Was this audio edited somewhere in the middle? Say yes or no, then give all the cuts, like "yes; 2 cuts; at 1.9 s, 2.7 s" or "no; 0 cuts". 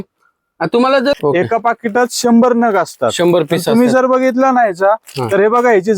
yes; 1 cut; at 1.2 s